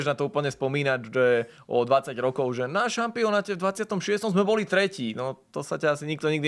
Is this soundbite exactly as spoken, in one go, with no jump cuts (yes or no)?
yes